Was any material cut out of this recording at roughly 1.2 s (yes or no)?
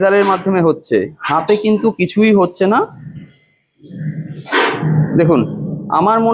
no